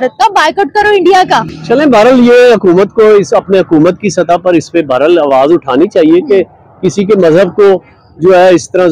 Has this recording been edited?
no; 0 cuts

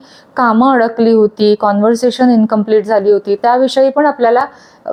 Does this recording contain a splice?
no; 0 cuts

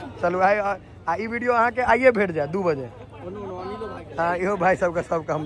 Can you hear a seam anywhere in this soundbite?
no; 0 cuts

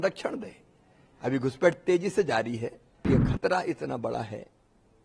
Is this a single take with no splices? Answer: no; 1 cut; at 3.1 s

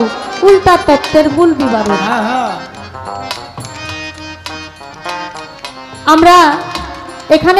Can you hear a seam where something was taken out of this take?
no; 0 cuts

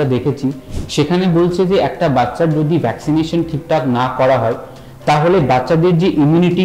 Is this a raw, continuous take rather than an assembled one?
yes; 0 cuts

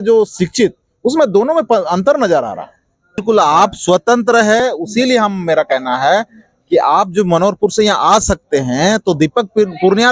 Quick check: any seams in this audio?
yes; 1 cut; at 3.2 s

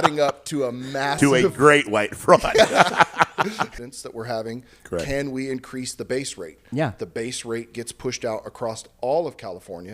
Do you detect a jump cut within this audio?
yes; 1 cut; at 3.7 s

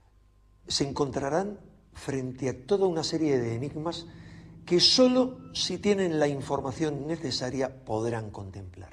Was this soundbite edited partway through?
yes; 1 cut; at 1.7 s

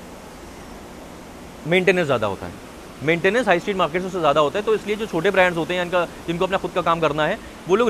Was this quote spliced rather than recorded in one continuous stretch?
no; 0 cuts

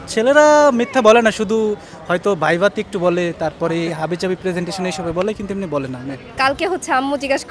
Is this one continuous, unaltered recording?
no; 1 cut; at 6.3 s

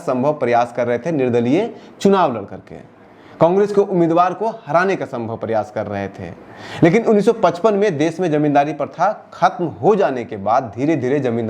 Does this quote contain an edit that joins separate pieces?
no; 0 cuts

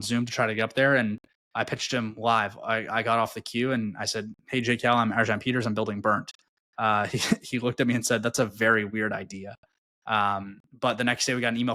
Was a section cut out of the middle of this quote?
no; 0 cuts

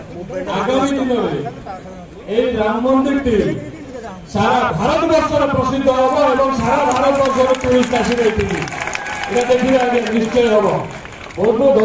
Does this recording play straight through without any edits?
yes; 0 cuts

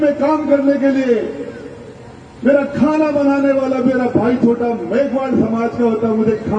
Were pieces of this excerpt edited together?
no; 0 cuts

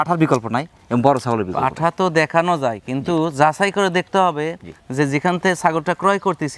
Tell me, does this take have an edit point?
no; 0 cuts

